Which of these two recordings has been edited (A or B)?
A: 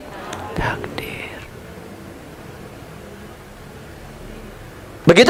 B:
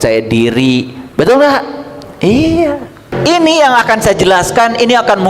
B